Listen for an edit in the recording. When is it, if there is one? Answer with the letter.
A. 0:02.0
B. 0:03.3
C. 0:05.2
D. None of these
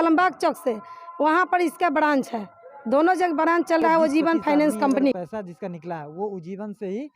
C